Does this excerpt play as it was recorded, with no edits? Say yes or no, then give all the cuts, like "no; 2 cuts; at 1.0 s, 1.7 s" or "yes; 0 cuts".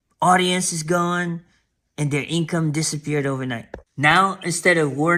yes; 0 cuts